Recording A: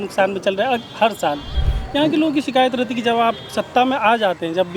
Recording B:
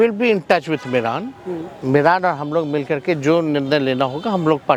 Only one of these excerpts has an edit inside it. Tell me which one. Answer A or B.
A